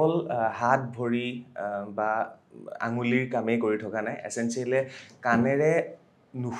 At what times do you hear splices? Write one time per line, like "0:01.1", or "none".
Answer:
none

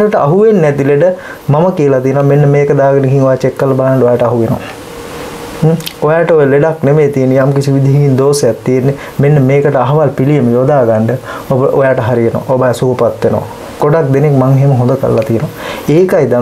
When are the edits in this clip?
none

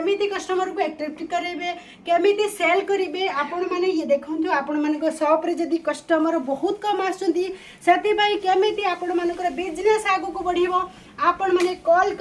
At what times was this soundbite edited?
none

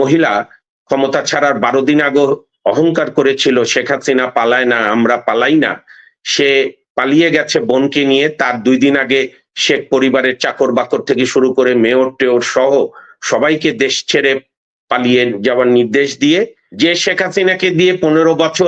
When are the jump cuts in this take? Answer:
0:16.6

